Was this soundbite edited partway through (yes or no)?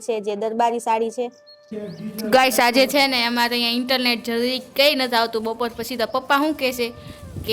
yes